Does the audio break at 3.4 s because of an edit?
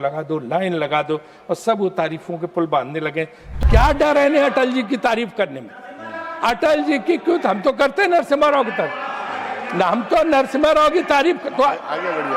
yes; 1 cut; at 3.4 s

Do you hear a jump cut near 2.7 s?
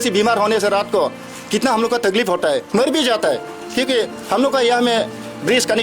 yes; 1 cut; at 2.7 s

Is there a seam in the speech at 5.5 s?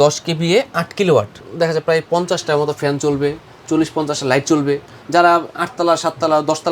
no; 1 cut; at 1.4 s

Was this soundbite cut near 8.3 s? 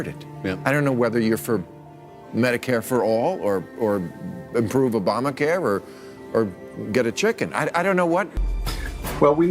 yes; 1 cut; at 8.3 s

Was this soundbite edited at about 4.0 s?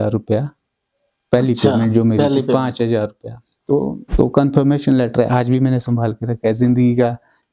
yes; 1 cut; at 4.0 s

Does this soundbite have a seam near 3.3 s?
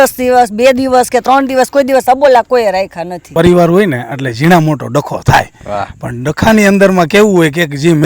yes; 1 cut; at 3.3 s

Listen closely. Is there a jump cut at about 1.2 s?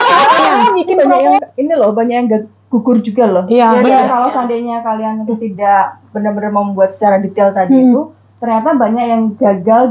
yes; 1 cut; at 1.2 s

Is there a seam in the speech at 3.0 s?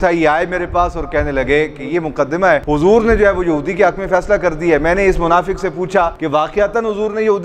no; 0 cuts

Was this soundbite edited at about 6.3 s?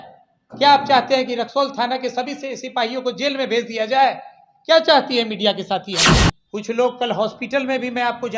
yes; 1 cut; at 6.3 s

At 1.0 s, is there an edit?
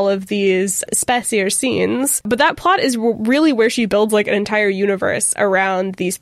no; 0 cuts

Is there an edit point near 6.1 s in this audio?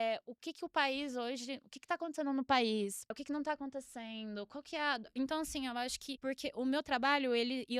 yes; 2 cuts; at 3.2 s, 6.1 s

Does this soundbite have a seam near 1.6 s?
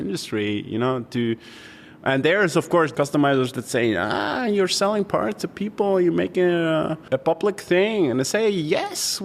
no; 2 cuts; at 2.9 s, 7.0 s

